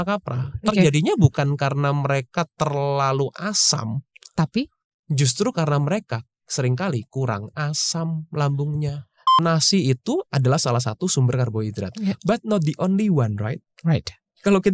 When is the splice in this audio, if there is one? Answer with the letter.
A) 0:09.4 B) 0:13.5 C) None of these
A